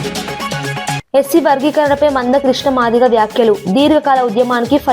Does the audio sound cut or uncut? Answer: cut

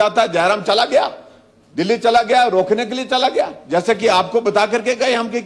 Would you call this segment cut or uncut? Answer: uncut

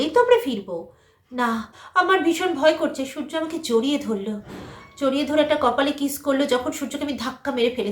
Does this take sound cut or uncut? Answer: cut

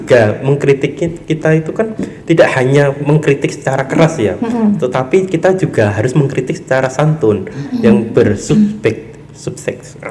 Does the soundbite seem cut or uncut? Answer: uncut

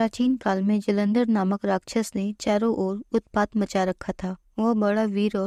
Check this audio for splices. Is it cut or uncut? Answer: uncut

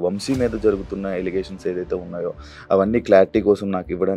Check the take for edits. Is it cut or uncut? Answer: uncut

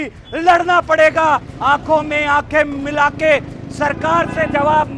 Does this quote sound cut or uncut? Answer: uncut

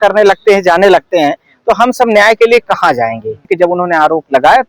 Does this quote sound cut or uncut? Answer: cut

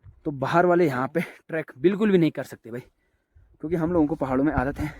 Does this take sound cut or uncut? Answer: uncut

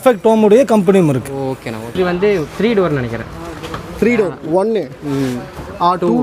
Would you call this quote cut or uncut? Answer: cut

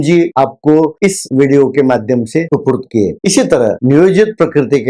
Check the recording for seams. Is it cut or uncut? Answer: cut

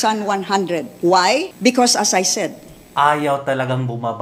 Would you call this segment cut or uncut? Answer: cut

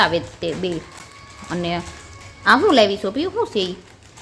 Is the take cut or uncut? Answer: uncut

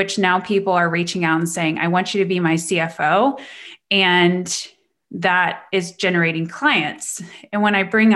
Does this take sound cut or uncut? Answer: uncut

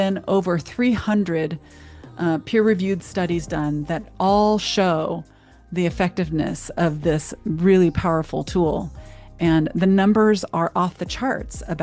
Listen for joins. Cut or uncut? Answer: uncut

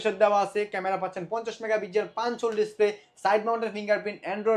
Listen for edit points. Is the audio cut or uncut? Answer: uncut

